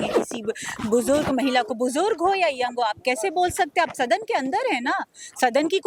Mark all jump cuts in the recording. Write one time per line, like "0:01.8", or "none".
none